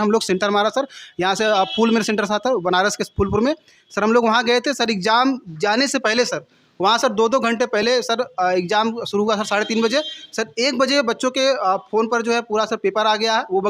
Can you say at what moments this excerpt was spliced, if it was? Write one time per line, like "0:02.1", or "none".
none